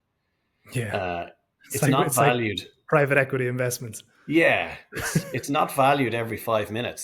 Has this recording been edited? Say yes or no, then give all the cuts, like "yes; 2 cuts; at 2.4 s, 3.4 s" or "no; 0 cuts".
no; 0 cuts